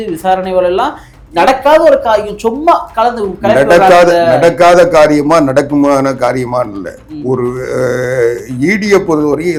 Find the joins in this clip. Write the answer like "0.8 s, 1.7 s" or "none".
none